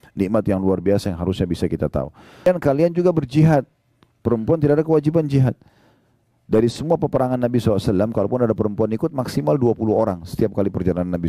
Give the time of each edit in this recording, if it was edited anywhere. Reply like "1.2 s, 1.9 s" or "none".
2.5 s